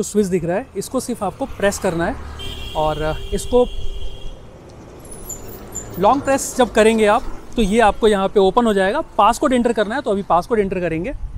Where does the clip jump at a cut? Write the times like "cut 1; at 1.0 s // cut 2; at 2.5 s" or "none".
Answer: none